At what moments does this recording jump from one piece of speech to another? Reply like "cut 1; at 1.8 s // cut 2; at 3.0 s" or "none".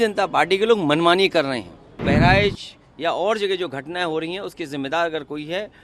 cut 1; at 2.0 s